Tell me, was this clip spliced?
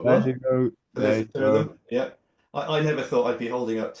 no; 0 cuts

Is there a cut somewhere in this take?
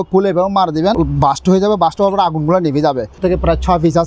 yes; 2 cuts; at 1.0 s, 3.2 s

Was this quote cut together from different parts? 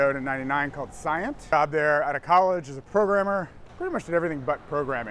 yes; 2 cuts; at 1.5 s, 3.6 s

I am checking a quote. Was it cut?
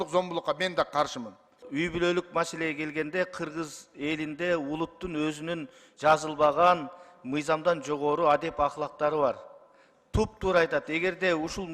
yes; 1 cut; at 1.6 s

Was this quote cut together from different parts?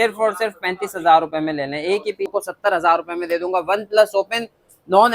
yes; 1 cut; at 2.3 s

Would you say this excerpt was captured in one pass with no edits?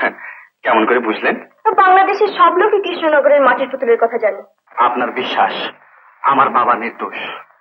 no; 1 cut; at 4.6 s

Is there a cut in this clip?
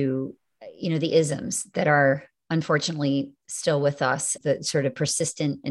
yes; 1 cut; at 4.4 s

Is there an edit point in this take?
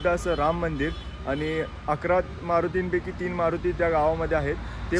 no; 0 cuts

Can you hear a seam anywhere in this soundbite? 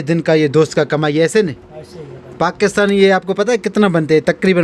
no; 0 cuts

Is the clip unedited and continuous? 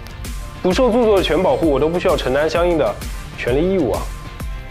yes; 0 cuts

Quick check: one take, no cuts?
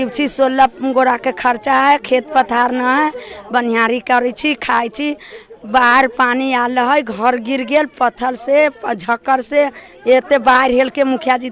yes; 0 cuts

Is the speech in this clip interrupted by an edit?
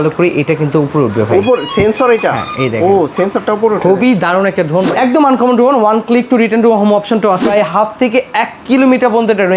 yes; 2 cuts; at 4.9 s, 7.5 s

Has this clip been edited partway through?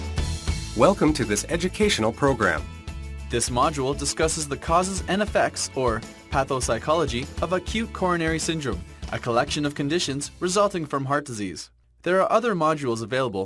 yes; 1 cut; at 9.5 s

